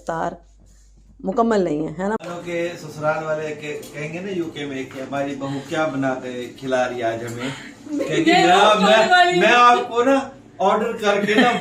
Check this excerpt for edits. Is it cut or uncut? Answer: cut